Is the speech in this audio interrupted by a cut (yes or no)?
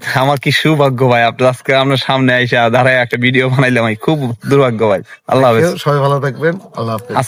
no